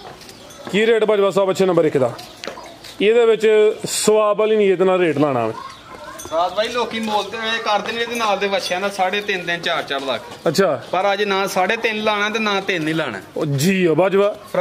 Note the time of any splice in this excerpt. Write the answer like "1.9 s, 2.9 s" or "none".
none